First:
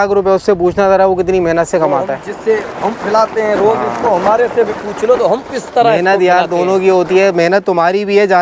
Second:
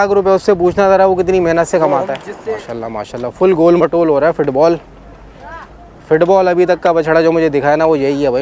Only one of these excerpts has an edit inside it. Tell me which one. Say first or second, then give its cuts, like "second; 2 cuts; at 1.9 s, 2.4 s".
second; 1 cut; at 2.3 s